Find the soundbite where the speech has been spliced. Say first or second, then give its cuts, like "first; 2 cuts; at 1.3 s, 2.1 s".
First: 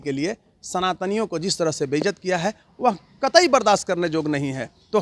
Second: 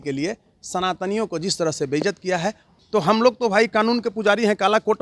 second; 1 cut; at 2.7 s